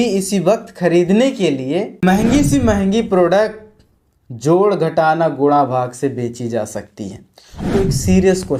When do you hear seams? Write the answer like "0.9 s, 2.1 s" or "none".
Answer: 2.0 s, 7.7 s